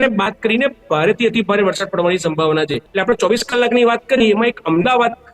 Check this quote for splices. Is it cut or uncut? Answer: cut